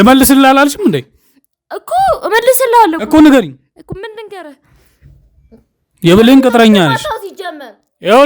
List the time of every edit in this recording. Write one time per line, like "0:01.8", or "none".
none